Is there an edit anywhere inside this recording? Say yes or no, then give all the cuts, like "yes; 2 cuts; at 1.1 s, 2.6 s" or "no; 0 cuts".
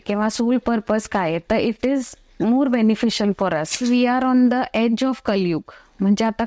yes; 1 cut; at 4.0 s